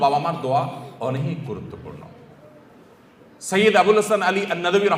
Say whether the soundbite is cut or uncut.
uncut